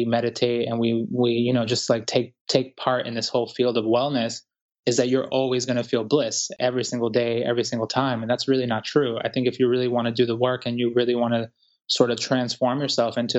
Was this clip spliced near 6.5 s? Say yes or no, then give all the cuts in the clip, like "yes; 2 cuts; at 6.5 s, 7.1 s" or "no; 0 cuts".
yes; 1 cut; at 6.5 s